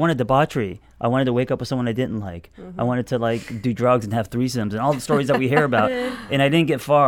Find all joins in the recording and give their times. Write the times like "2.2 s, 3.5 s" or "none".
none